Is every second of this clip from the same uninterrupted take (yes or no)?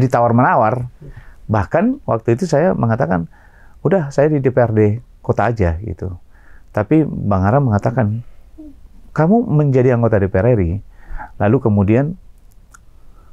yes